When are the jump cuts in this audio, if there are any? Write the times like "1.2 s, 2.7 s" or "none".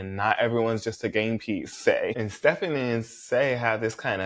none